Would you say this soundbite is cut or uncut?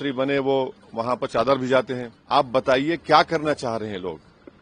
cut